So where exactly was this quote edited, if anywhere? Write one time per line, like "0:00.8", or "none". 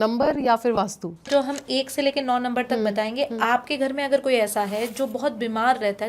0:01.3